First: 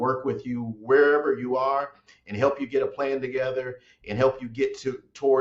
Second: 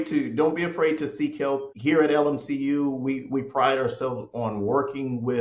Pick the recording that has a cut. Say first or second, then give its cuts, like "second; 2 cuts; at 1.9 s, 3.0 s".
second; 1 cut; at 1.7 s